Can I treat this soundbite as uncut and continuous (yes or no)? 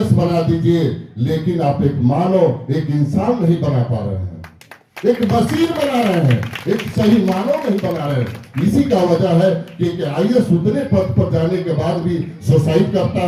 yes